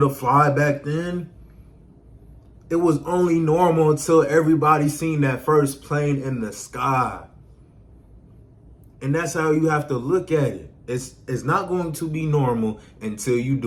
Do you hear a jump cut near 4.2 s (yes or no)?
no